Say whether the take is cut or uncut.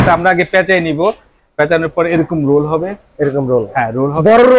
uncut